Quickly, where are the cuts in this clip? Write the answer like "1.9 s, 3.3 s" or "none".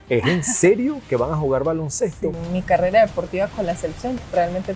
2.4 s